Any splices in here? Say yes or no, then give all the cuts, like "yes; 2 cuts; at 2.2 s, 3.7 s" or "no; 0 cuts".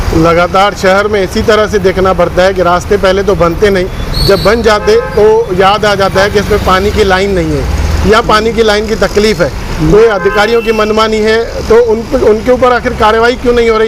no; 0 cuts